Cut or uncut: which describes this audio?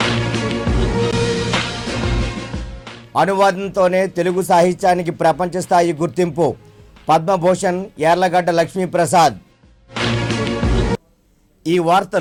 uncut